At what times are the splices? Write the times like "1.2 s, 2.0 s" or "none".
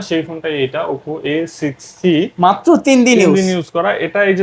none